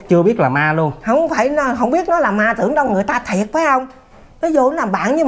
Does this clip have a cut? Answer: no; 0 cuts

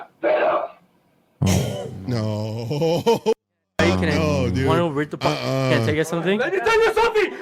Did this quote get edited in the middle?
yes; 1 cut; at 6.4 s

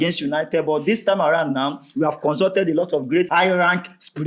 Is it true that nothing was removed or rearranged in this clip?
no; 1 cut; at 3.3 s

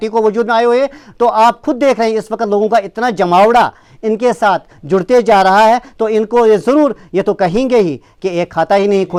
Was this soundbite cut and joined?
no; 0 cuts

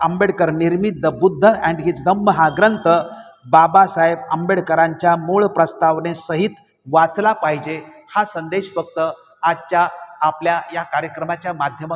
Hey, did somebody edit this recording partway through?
no; 0 cuts

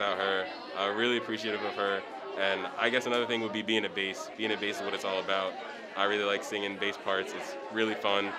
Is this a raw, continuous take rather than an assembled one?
yes; 0 cuts

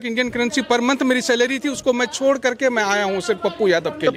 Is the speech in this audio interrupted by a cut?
no; 0 cuts

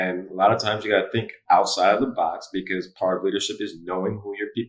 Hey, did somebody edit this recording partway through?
no; 0 cuts

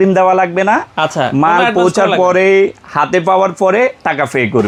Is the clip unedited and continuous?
yes; 0 cuts

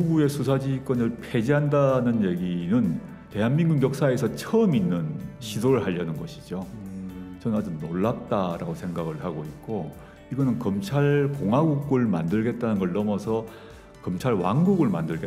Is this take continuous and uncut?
yes; 0 cuts

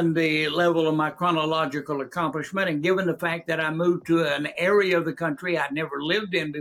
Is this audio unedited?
yes; 0 cuts

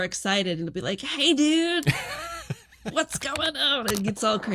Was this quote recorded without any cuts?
yes; 0 cuts

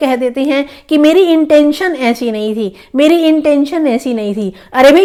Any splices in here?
no; 0 cuts

